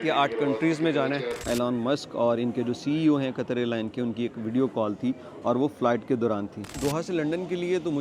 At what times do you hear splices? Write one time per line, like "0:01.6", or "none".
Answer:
0:01.4
0:06.7